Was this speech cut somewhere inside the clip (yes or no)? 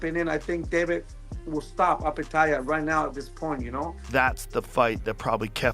yes